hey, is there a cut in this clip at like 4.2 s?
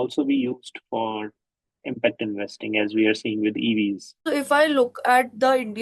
yes; 1 cut; at 4.2 s

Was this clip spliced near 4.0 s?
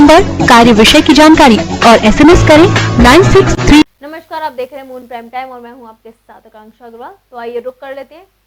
yes; 1 cut; at 4.0 s

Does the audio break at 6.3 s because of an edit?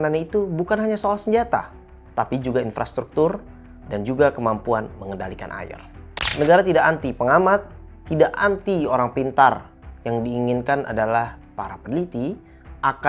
yes; 1 cut; at 6.3 s

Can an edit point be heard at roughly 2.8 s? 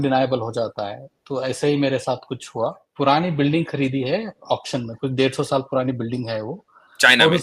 yes; 1 cut; at 2.8 s

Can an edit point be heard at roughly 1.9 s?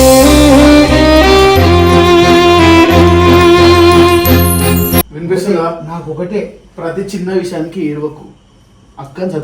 no; 1 cut; at 5.2 s

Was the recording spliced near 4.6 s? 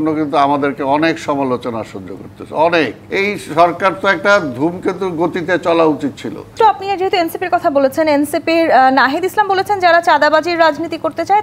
no; 2 cuts; at 3.0 s, 6.5 s

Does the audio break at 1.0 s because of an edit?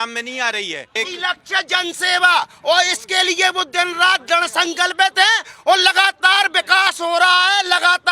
yes; 1 cut; at 1.0 s

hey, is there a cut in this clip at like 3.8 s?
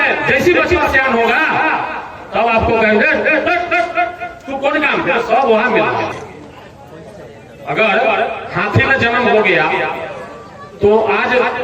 no; 1 cut; at 6.2 s

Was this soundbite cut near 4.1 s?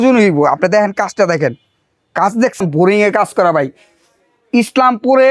no; 1 cut; at 2.6 s

